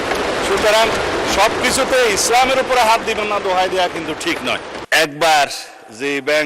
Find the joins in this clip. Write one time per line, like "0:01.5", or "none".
0:04.7